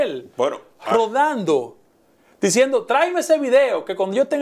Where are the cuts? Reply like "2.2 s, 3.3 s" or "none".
none